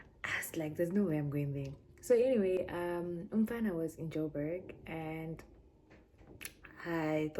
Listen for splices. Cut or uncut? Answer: uncut